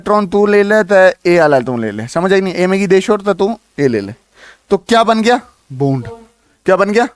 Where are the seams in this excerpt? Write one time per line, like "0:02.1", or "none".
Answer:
none